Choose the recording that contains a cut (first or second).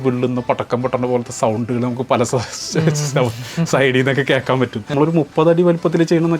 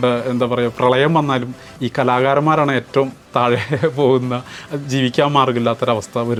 first